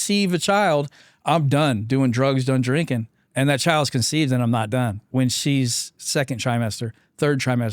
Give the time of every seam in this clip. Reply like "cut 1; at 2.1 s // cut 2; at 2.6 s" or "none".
cut 1; at 3.2 s // cut 2; at 5.0 s